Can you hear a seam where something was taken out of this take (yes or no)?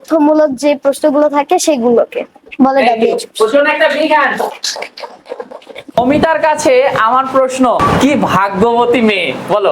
yes